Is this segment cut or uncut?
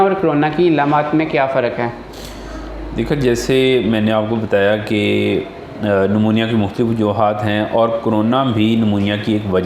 uncut